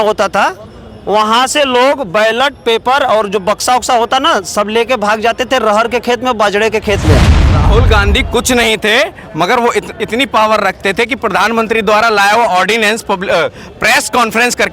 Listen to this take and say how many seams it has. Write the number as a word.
one